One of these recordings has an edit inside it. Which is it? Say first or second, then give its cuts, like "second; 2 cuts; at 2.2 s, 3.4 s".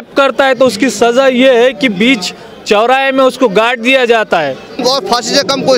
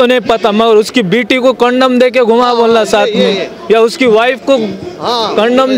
first; 1 cut; at 4.8 s